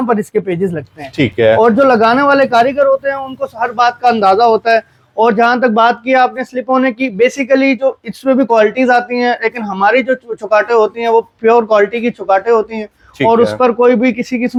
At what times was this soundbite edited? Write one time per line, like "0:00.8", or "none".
none